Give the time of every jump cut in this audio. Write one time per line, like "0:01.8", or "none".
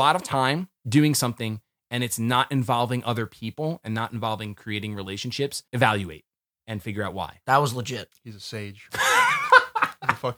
0:05.6
0:07.4

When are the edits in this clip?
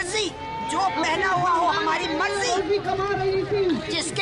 none

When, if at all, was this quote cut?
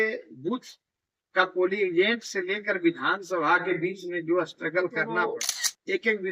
0:05.2

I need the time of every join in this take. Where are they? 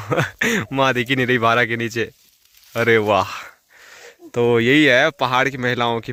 none

